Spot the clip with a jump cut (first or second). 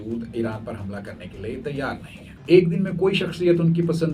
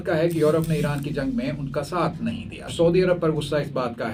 first